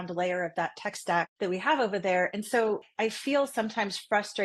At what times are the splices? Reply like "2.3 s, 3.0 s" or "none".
1.3 s, 2.9 s